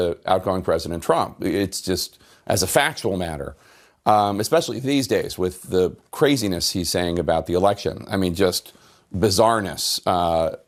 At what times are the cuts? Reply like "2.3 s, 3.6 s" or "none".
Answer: none